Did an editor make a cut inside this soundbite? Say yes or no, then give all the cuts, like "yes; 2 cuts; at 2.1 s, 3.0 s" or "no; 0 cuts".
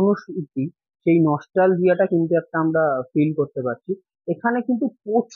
no; 0 cuts